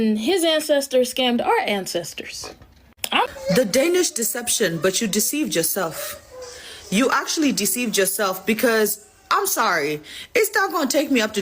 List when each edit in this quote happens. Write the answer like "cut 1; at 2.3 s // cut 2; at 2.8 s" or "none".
cut 1; at 3.3 s